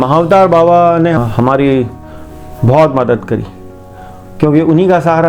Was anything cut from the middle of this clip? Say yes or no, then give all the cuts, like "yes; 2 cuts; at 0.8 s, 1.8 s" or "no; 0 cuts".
yes; 1 cut; at 1.2 s